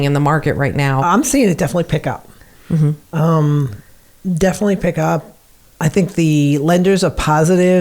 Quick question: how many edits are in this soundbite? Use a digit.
1